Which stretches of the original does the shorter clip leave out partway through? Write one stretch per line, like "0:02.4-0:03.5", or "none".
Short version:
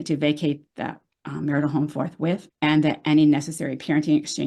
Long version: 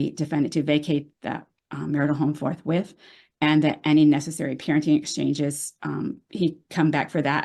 0:02.9-0:03.3